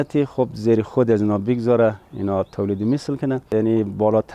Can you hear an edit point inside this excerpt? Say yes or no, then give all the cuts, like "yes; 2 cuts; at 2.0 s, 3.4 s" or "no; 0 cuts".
yes; 1 cut; at 3.4 s